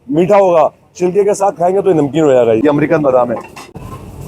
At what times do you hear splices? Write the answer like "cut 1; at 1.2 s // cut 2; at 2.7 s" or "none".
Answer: cut 1; at 2.6 s